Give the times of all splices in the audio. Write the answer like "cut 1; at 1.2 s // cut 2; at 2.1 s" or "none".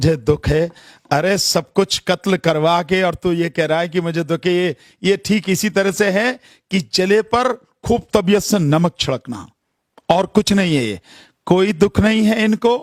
none

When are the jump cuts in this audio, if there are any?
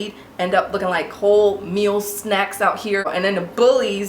cut 1; at 3.1 s

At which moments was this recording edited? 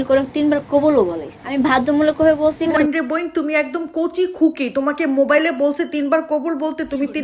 cut 1; at 1.5 s // cut 2; at 2.7 s

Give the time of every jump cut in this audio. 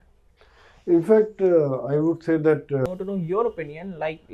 cut 1; at 2.9 s

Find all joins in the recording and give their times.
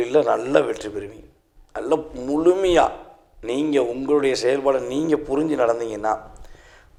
none

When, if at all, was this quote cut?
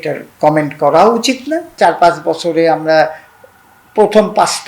cut 1; at 1.7 s

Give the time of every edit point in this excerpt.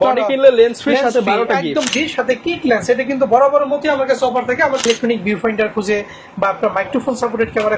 cut 1; at 1.9 s // cut 2; at 4.9 s

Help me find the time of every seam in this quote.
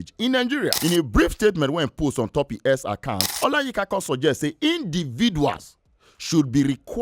cut 1; at 0.8 s // cut 2; at 3.2 s

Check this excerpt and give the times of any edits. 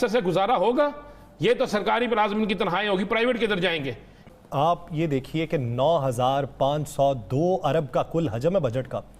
cut 1; at 4.2 s

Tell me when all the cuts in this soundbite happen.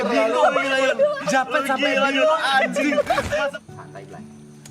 cut 1; at 3.6 s

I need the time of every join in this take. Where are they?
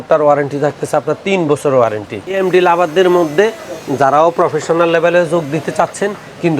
cut 1; at 2.4 s

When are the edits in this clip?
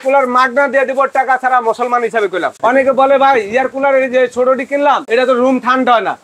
cut 1; at 2.6 s // cut 2; at 5.0 s

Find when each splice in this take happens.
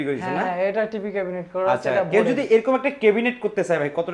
none

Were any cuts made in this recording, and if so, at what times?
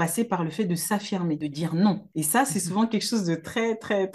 cut 1; at 1.4 s // cut 2; at 2.1 s

